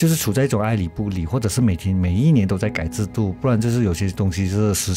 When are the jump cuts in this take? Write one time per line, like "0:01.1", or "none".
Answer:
none